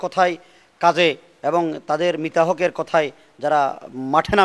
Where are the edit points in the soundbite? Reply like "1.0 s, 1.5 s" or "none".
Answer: none